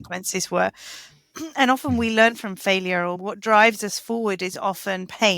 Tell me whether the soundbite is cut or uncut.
cut